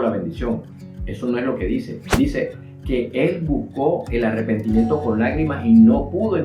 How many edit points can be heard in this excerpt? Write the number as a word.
zero